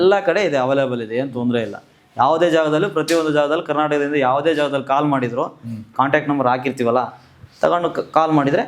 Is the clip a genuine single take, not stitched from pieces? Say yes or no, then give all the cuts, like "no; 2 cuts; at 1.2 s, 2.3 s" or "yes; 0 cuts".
yes; 0 cuts